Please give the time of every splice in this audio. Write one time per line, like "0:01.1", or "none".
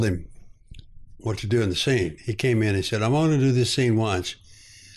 none